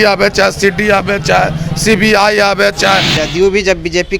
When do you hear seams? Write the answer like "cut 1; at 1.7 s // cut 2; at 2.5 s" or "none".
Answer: cut 1; at 3.1 s

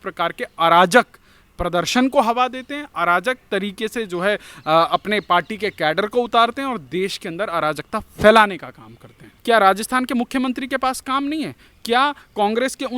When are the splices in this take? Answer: cut 1; at 9.3 s

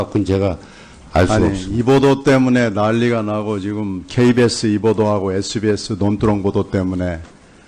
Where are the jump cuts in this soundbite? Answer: cut 1; at 3.3 s

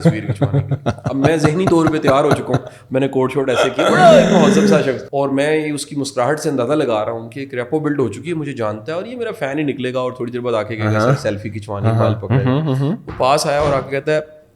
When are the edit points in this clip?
cut 1; at 5.0 s

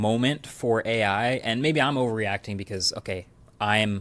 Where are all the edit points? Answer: cut 1; at 1.3 s

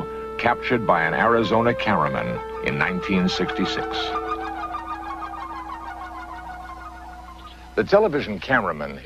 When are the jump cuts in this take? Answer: cut 1; at 4.2 s

